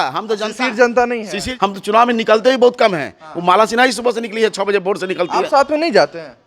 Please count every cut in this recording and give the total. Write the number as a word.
one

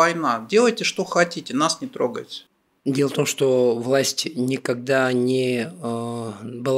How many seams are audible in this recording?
one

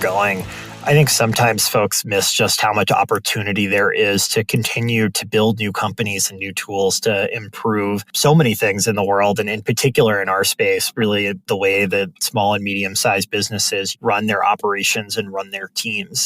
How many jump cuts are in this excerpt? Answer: one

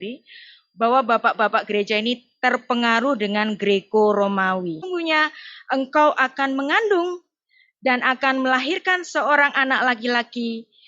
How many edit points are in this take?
one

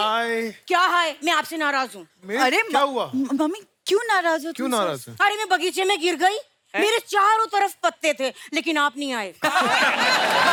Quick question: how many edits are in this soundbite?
zero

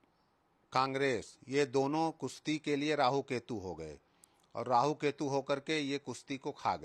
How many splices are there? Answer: zero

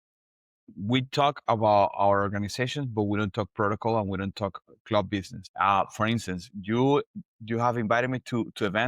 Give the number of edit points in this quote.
one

